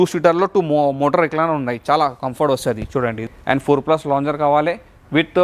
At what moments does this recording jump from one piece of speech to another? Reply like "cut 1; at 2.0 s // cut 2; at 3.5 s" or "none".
cut 1; at 3.3 s